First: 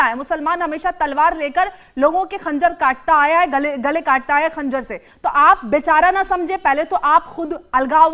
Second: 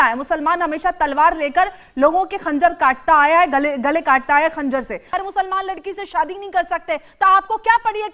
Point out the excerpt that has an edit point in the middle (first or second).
second